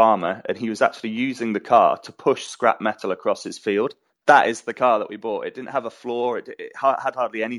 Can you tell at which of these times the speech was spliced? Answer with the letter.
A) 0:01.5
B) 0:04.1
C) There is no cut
B